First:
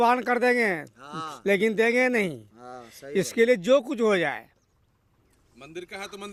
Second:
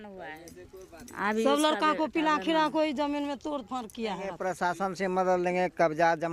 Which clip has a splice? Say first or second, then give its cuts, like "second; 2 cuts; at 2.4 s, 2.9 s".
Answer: second; 1 cut; at 4.4 s